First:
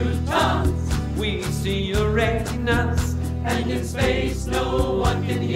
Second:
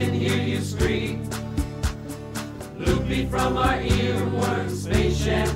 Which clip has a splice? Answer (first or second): first